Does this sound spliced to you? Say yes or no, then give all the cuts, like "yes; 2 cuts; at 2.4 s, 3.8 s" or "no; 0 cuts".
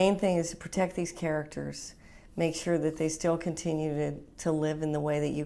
no; 0 cuts